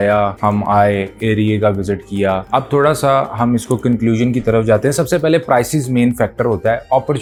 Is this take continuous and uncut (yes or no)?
yes